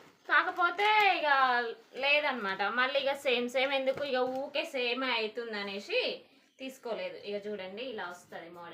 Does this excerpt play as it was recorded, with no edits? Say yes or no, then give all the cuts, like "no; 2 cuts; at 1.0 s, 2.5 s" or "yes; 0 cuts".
yes; 0 cuts